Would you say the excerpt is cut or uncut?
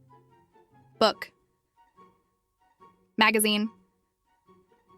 uncut